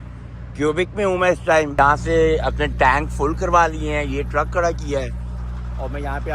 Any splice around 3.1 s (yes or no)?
no